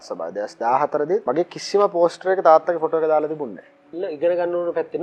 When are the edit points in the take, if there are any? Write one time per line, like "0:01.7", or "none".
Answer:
0:01.2
0:04.0